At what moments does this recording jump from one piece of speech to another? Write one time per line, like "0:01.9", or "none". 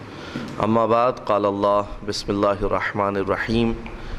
0:02.6